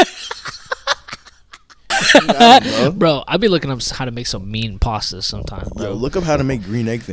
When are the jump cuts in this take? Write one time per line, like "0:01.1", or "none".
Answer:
0:01.9